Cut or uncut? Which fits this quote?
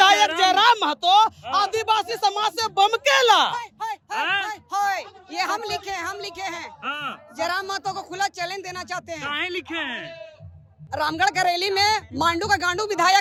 uncut